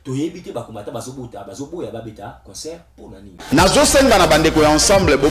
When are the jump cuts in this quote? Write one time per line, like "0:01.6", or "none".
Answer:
0:03.4